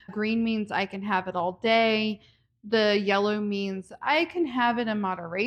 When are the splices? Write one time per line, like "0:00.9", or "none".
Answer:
none